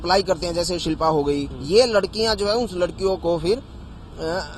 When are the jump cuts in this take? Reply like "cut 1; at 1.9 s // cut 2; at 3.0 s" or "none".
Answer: cut 1; at 1.5 s